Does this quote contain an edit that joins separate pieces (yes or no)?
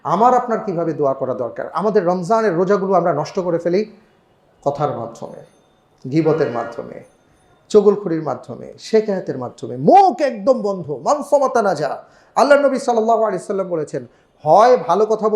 yes